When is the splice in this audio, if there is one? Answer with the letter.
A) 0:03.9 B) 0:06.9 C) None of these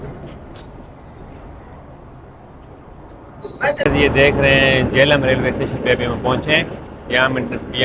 A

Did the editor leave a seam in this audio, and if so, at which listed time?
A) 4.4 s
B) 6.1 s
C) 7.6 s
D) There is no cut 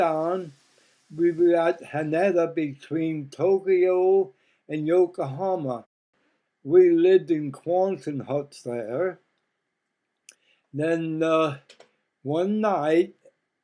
B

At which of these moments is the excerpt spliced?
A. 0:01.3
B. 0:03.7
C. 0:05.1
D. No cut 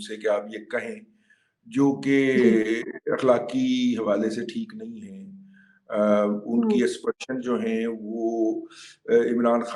D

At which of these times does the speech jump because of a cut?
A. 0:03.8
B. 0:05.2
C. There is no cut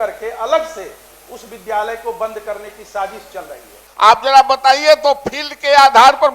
A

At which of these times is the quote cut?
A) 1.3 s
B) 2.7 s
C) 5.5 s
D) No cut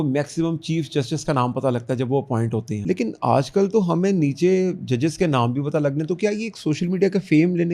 B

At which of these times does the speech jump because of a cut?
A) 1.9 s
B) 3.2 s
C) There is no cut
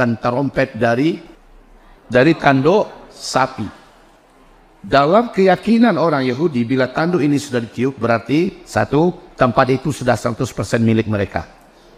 A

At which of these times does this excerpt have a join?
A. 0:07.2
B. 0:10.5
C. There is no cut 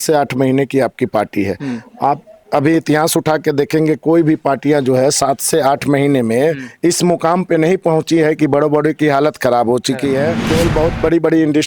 B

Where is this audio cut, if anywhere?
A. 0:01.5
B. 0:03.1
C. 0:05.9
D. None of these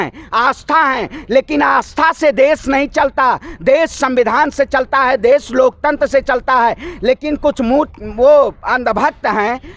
D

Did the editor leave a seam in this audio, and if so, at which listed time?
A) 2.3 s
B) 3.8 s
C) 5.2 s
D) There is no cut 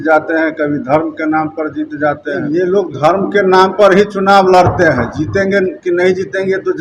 A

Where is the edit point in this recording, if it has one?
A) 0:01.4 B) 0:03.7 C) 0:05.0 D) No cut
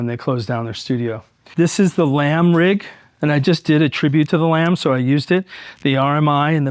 A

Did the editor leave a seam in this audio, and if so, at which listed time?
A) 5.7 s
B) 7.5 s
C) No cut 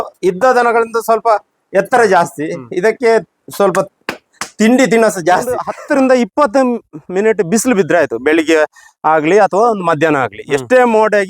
A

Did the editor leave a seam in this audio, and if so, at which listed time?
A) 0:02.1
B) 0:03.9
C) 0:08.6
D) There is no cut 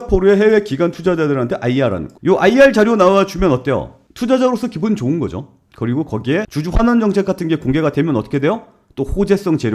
A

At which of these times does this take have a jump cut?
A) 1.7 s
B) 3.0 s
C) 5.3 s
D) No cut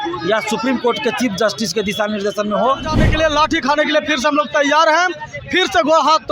B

